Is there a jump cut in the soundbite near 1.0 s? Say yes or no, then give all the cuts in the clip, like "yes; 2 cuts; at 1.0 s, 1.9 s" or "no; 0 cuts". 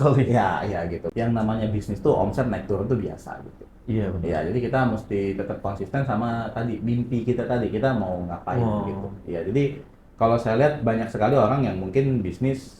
yes; 1 cut; at 1.0 s